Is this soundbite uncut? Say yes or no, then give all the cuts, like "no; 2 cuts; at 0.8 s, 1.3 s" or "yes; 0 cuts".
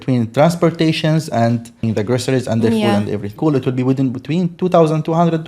no; 2 cuts; at 1.8 s, 3.3 s